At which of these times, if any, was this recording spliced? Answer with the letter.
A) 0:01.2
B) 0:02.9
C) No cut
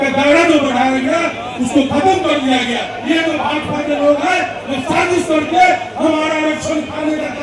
B